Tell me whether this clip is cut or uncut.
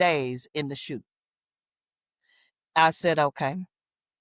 uncut